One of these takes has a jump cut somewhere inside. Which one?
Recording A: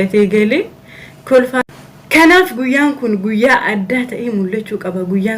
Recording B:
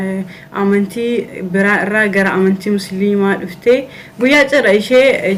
A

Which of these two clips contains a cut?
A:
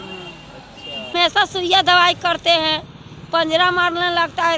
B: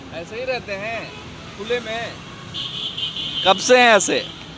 A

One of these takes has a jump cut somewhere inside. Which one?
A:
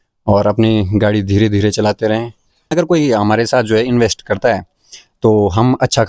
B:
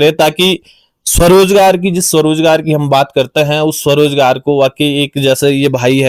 A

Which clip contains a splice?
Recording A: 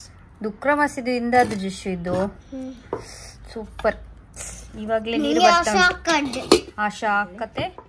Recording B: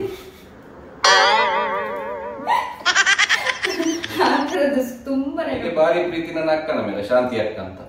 B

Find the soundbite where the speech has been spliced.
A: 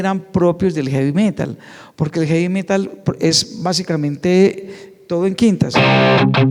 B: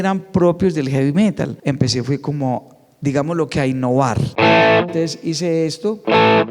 B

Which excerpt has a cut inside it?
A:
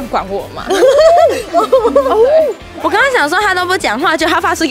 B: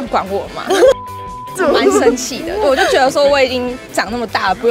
A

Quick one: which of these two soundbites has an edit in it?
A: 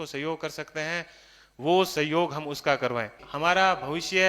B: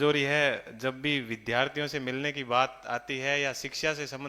A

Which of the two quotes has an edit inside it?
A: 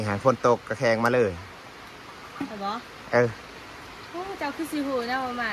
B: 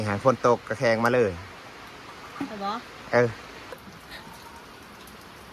B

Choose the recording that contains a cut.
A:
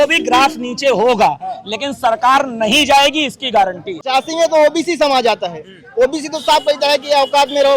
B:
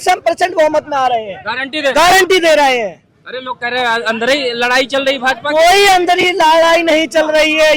A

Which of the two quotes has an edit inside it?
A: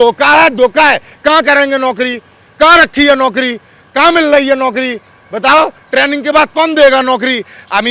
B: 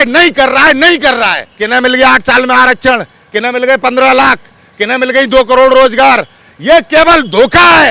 B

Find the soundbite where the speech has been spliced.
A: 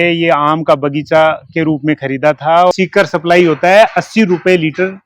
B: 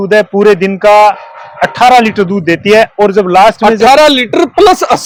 A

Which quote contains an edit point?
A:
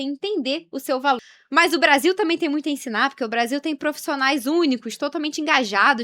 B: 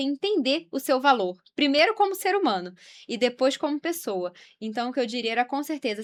A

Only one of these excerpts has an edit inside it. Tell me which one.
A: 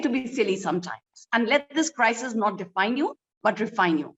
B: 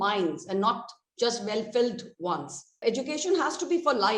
B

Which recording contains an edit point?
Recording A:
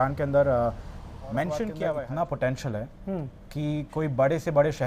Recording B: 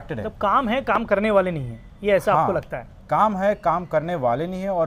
A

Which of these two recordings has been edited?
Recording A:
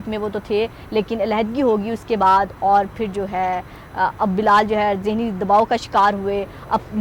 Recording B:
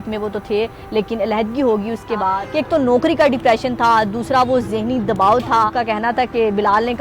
B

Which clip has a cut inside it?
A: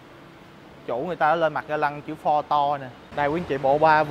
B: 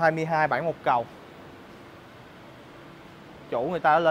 A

